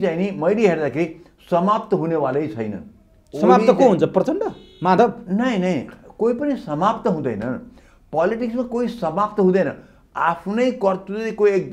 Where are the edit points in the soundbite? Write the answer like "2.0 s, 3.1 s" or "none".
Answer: none